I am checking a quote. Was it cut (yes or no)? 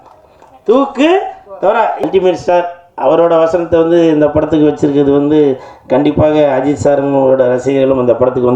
yes